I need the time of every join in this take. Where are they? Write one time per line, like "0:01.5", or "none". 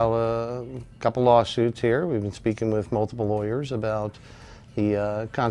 none